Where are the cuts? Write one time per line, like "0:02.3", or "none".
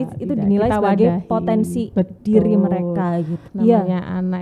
0:03.4